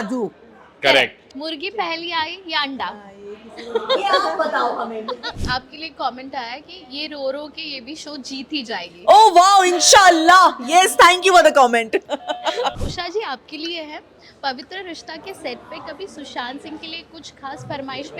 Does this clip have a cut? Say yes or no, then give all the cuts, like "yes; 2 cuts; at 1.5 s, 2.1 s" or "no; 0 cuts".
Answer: yes; 3 cuts; at 1.3 s, 5.3 s, 12.8 s